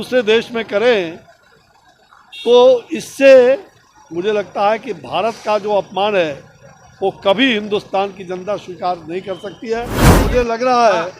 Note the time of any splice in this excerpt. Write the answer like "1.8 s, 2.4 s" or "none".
10.1 s